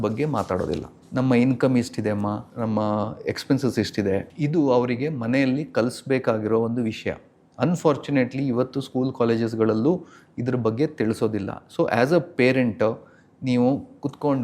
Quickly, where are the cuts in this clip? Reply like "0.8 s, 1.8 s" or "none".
1.0 s, 2.5 s, 4.3 s